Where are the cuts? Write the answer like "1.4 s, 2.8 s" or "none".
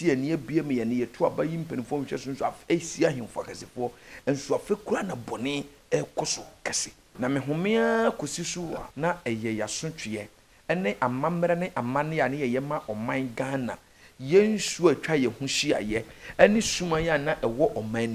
7.0 s, 8.9 s